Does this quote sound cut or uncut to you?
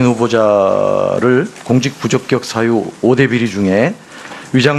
cut